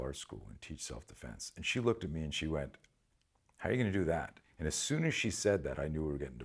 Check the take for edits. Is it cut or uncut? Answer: uncut